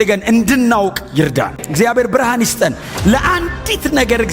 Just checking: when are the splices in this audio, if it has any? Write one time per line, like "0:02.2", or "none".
0:01.6